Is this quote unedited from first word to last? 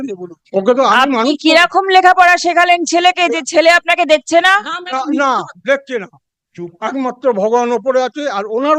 yes; 0 cuts

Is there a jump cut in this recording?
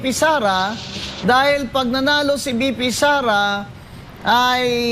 no; 0 cuts

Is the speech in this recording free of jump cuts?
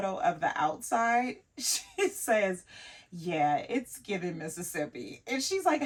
yes; 0 cuts

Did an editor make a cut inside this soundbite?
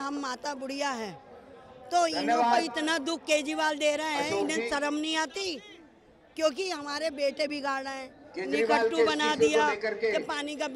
no; 0 cuts

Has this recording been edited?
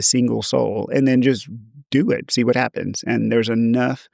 no; 0 cuts

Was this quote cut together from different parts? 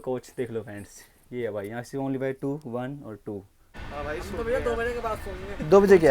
yes; 1 cut; at 3.7 s

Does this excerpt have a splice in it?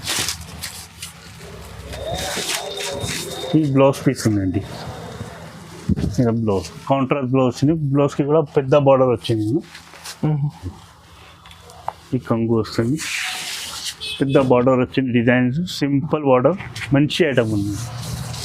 yes; 1 cut; at 10.7 s

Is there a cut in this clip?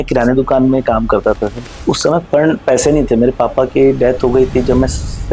no; 0 cuts

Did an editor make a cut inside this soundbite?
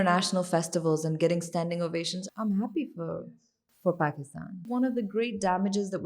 yes; 2 cuts; at 2.2 s, 4.6 s

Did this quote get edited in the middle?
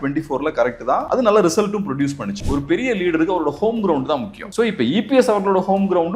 yes; 3 cuts; at 1.0 s, 2.4 s, 4.4 s

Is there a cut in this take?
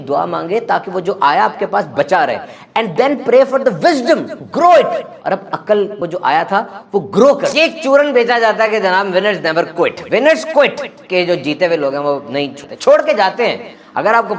yes; 1 cut; at 7.5 s

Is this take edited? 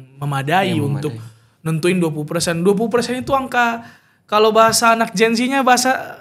no; 0 cuts

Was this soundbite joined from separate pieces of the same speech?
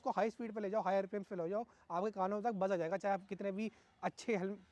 no; 0 cuts

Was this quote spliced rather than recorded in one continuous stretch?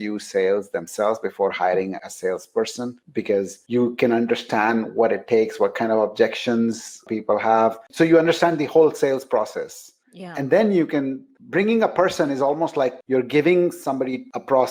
no; 0 cuts

